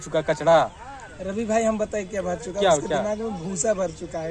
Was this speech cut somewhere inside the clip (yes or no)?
no